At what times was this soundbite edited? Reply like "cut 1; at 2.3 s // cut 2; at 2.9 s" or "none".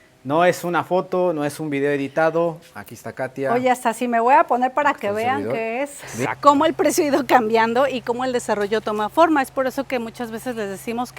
cut 1; at 6.1 s